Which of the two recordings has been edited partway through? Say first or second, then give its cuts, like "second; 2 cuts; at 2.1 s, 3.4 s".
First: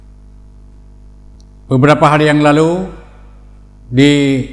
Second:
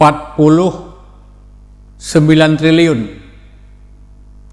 first; 1 cut; at 1.3 s